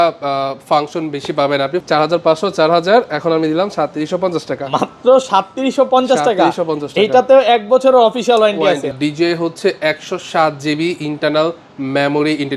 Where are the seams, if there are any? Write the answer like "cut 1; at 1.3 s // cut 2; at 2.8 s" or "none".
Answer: cut 1; at 1.8 s // cut 2; at 8.9 s